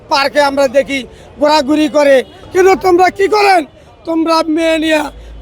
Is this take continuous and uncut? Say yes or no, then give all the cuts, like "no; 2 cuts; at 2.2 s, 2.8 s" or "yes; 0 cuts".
no; 1 cut; at 2.4 s